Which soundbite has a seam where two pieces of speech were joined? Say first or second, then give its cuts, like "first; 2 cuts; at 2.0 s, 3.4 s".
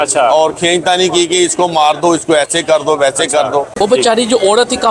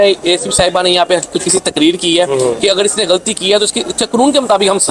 first; 1 cut; at 3.7 s